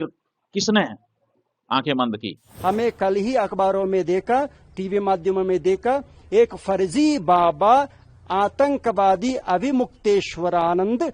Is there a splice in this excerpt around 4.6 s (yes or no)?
no